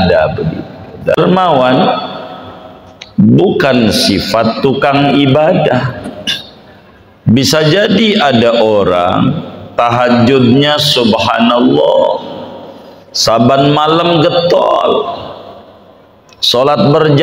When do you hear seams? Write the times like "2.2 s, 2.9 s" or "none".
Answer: 1.2 s